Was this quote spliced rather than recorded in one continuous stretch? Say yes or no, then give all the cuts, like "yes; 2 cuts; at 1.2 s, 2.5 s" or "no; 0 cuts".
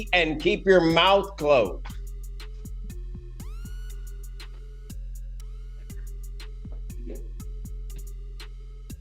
no; 0 cuts